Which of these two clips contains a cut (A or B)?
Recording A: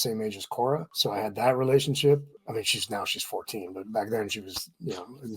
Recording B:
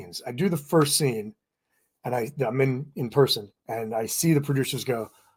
A